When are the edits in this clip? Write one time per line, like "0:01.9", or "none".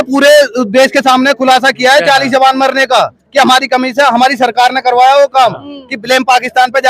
none